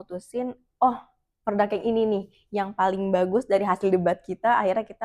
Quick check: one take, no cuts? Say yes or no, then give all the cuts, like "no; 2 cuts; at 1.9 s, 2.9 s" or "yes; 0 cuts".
yes; 0 cuts